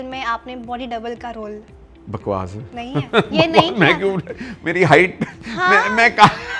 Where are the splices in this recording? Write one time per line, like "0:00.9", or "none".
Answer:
none